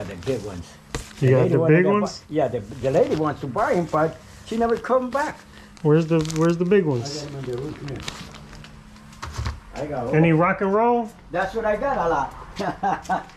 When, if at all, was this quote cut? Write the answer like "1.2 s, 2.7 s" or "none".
none